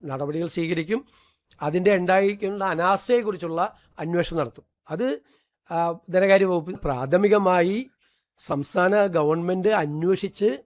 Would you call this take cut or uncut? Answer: cut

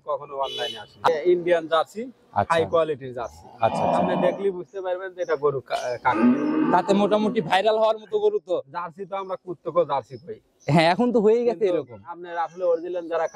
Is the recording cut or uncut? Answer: cut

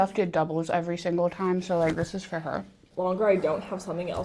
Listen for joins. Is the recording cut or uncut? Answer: cut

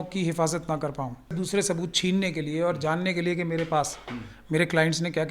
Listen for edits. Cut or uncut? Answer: cut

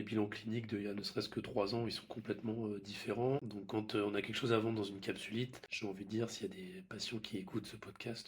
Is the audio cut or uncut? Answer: cut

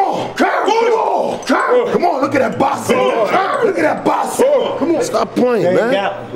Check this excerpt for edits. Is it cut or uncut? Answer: cut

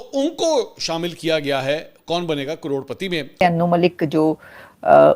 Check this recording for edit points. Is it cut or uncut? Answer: cut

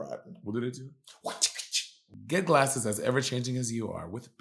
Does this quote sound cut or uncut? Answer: cut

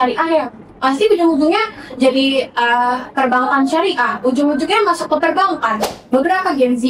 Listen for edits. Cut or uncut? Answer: cut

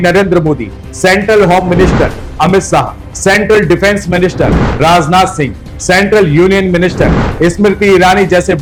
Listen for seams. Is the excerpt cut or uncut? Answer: uncut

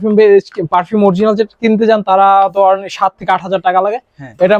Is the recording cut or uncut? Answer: uncut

